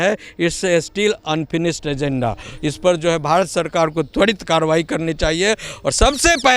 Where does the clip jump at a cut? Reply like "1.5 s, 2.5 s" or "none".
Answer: none